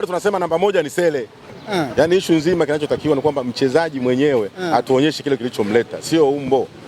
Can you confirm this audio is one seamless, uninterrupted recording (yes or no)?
no